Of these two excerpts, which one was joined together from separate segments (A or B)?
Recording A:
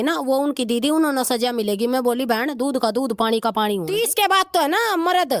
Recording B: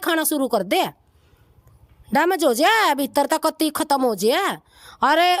A